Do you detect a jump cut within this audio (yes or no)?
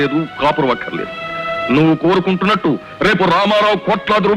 no